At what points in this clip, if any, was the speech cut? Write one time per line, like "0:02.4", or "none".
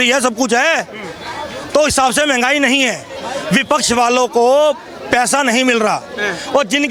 none